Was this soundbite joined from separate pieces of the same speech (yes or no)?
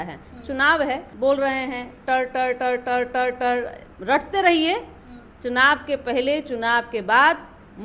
yes